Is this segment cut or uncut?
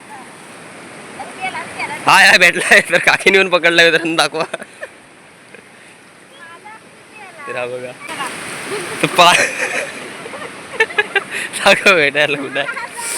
cut